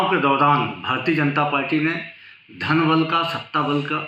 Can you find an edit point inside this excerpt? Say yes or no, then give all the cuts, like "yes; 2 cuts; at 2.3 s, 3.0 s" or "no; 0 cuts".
no; 0 cuts